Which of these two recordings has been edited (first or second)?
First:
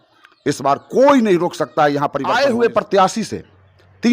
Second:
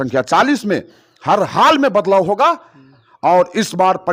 first